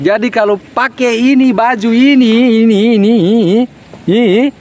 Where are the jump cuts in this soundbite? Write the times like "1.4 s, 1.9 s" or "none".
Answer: none